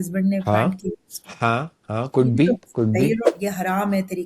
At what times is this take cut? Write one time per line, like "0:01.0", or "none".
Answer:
0:03.3